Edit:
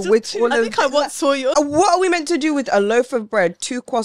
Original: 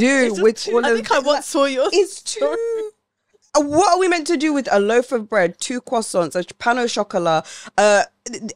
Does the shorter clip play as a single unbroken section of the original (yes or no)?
no